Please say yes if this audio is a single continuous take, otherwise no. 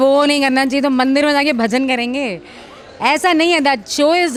yes